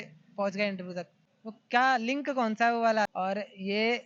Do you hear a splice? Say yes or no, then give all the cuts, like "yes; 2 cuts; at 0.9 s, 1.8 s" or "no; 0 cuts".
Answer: yes; 2 cuts; at 1.1 s, 3.1 s